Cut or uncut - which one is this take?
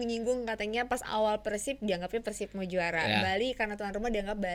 uncut